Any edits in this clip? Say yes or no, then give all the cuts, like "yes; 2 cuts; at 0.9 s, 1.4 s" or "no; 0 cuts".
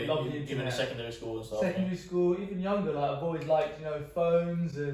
no; 0 cuts